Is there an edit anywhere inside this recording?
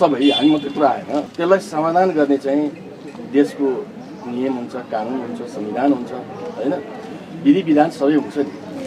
yes; 1 cut; at 1.3 s

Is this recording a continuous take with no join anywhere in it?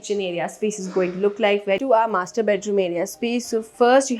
no; 1 cut; at 1.8 s

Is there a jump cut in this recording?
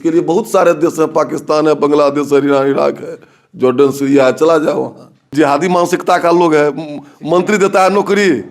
yes; 1 cut; at 5.3 s

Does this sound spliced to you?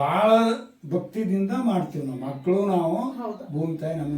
no; 0 cuts

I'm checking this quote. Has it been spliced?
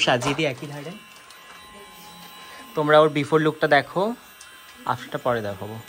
no; 0 cuts

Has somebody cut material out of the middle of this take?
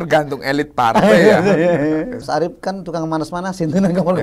yes; 1 cut; at 2.2 s

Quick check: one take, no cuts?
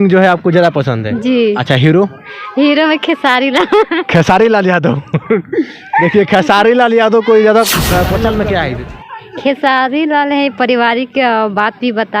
no; 1 cut; at 8.1 s

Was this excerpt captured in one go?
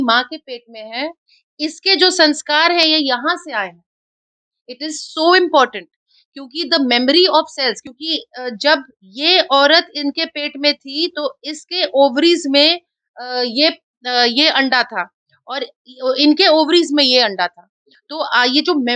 yes; 0 cuts

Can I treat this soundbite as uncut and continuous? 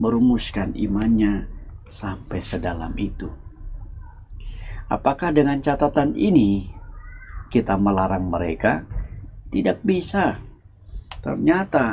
yes; 0 cuts

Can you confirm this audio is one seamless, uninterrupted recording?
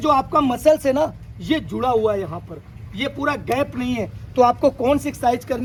yes; 0 cuts

